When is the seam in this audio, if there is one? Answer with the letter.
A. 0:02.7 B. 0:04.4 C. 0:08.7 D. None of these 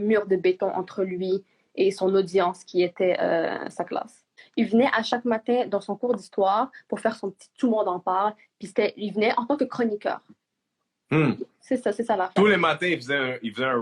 B